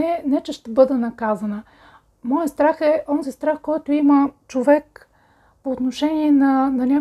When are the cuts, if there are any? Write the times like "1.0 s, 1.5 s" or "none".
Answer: none